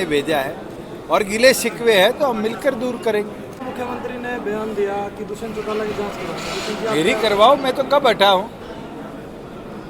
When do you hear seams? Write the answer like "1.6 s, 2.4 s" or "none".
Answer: 3.7 s